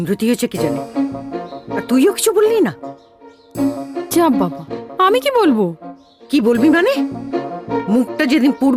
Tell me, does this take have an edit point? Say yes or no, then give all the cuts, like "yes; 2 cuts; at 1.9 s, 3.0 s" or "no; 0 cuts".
no; 0 cuts